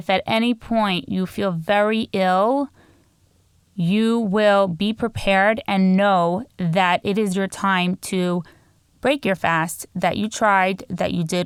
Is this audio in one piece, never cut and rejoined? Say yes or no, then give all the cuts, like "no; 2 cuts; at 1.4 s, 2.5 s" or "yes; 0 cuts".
yes; 0 cuts